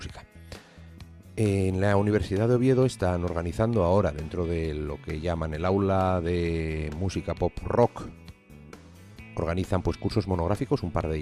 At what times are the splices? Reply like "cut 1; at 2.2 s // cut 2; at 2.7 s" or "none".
cut 1; at 4.5 s